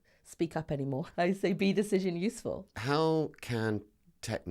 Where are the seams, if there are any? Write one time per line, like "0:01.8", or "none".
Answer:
0:01.1
0:02.7